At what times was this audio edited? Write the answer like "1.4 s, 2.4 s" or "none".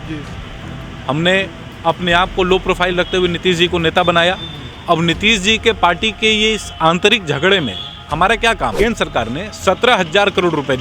8.7 s